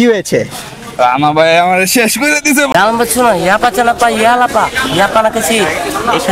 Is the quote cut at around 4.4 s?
no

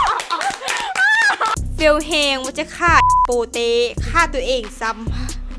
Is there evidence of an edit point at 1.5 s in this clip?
yes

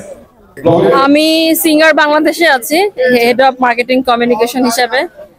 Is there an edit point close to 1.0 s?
yes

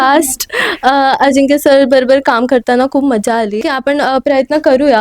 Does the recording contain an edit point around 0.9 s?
no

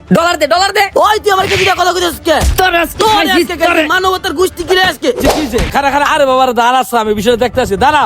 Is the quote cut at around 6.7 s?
no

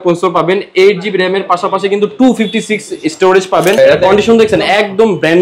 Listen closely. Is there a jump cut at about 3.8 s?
yes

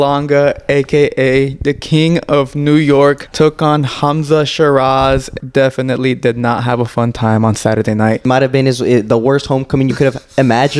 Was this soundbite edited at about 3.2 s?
yes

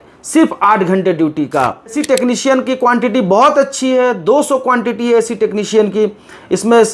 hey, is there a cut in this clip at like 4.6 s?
no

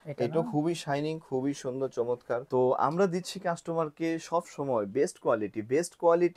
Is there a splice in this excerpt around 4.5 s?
no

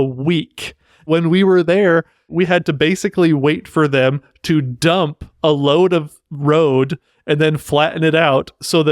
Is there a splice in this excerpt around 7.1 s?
no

